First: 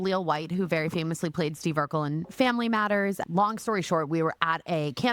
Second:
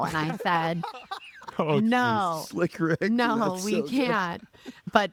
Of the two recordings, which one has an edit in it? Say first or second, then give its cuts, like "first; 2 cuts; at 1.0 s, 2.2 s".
first; 1 cut; at 3.2 s